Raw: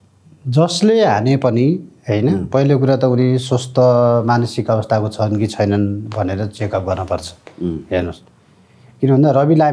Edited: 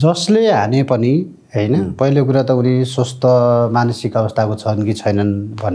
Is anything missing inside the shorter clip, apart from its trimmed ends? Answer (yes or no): no